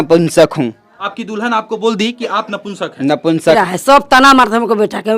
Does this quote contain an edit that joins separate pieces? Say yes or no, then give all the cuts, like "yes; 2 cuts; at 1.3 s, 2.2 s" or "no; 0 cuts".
yes; 2 cuts; at 1.0 s, 3.6 s